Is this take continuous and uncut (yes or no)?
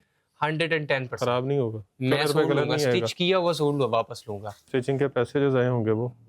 no